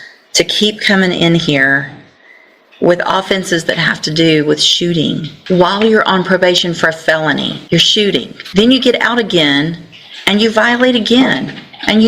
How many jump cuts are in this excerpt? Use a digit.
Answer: 3